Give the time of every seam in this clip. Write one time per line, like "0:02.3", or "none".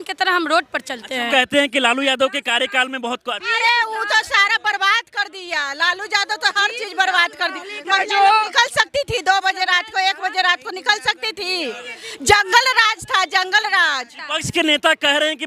0:01.3
0:14.2